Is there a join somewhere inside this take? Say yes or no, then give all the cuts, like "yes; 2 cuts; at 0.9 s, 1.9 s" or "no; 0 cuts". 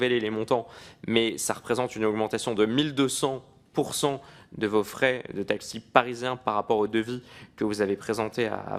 no; 0 cuts